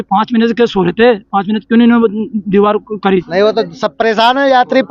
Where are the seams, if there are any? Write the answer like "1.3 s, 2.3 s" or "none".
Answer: 3.3 s